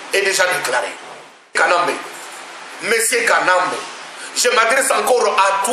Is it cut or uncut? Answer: cut